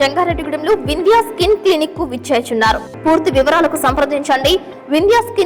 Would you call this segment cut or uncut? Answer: cut